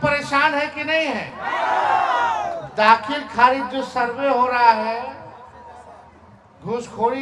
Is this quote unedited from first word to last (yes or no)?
yes